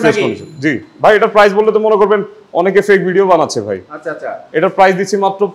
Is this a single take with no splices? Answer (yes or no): yes